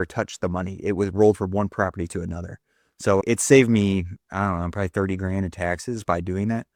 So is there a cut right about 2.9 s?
no; 0 cuts

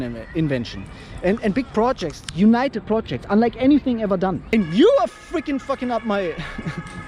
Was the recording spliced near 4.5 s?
yes; 1 cut; at 4.5 s

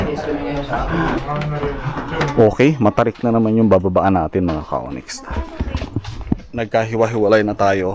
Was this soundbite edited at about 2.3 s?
yes; 1 cut; at 2.3 s

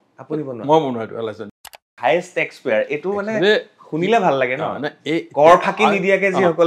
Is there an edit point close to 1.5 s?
yes; 1 cut; at 1.5 s

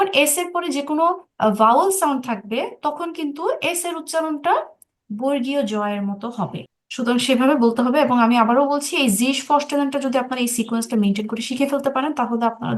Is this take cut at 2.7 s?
no; 1 cut; at 6.6 s

